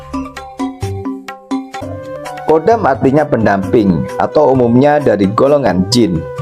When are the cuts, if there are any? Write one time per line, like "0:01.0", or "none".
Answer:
0:02.0